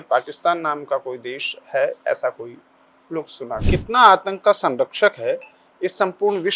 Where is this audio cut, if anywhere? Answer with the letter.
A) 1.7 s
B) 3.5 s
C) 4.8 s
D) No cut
B